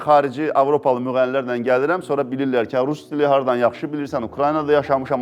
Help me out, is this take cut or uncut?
uncut